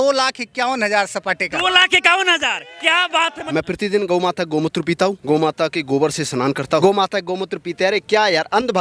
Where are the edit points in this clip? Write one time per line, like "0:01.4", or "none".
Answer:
0:03.5
0:05.2
0:06.8